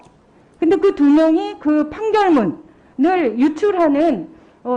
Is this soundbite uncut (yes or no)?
yes